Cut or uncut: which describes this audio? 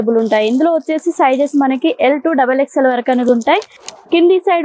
cut